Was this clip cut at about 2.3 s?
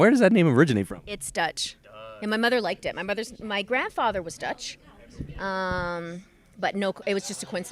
yes; 1 cut; at 2.3 s

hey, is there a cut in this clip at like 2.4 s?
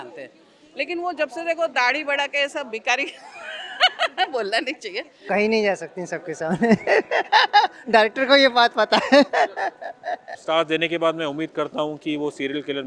no; 2 cuts; at 5.2 s, 10.3 s

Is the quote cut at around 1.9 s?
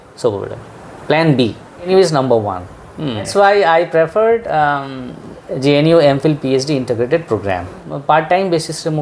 yes; 3 cuts; at 1.9 s, 3.3 s, 7.9 s

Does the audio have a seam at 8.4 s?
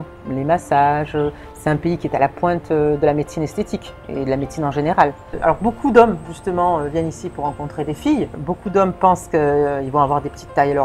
yes; 2 cuts; at 5.3 s, 8.4 s

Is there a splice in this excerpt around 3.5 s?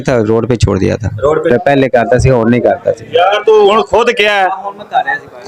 no; 1 cut; at 1.5 s

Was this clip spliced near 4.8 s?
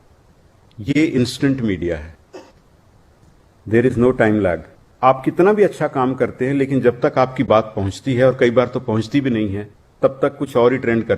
yes; 1 cut; at 4.8 s

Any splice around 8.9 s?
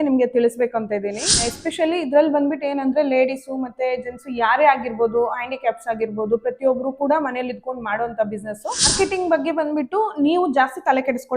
yes; 2 cuts; at 1.4 s, 8.9 s

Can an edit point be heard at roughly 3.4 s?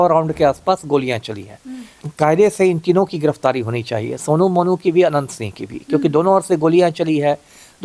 no; 1 cut; at 2.0 s

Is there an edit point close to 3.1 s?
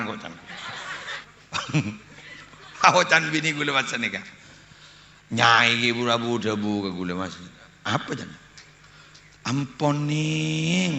no; 1 cut; at 1.2 s

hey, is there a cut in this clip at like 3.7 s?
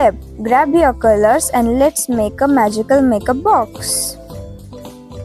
yes; 1 cut; at 3.7 s

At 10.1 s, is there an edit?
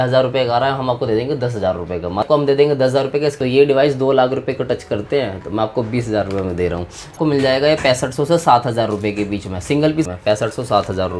yes; 4 cuts; at 2.3 s, 3.4 s, 7.2 s, 10.1 s

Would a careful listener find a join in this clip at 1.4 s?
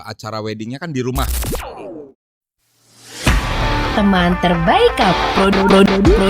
yes; 1 cut; at 1.4 s

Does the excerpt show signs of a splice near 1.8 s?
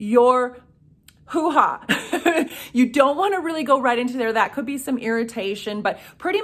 no; 0 cuts

